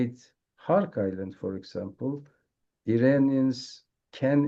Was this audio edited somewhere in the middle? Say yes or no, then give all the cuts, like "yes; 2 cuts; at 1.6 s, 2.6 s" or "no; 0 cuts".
no; 0 cuts